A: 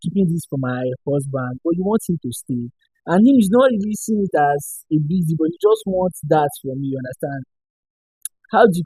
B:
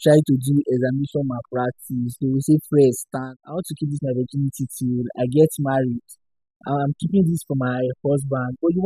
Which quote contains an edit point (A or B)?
B